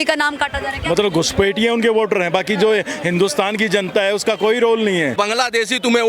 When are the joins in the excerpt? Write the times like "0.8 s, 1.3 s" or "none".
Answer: 5.1 s